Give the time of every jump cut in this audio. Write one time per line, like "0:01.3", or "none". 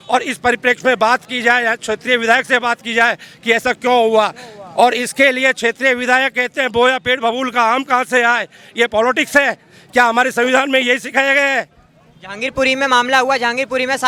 none